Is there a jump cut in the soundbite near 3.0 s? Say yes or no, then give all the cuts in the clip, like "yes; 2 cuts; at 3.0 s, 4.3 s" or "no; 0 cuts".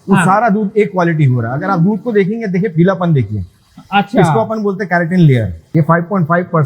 no; 1 cut; at 5.6 s